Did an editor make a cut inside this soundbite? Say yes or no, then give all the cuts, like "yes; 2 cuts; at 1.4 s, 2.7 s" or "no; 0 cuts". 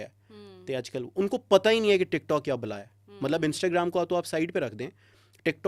no; 0 cuts